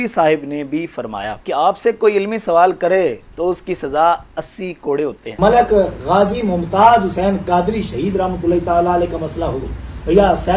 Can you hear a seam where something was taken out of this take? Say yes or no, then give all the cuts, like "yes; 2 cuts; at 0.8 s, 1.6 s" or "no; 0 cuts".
yes; 2 cuts; at 1.3 s, 5.3 s